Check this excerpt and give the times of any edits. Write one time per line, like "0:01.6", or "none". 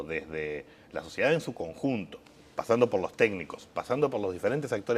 0:03.9